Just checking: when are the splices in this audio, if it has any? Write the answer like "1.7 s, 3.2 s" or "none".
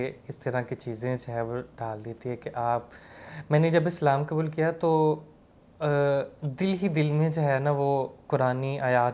none